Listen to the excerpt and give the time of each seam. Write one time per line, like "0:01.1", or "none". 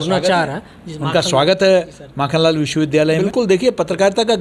0:03.2